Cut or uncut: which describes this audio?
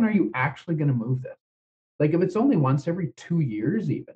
uncut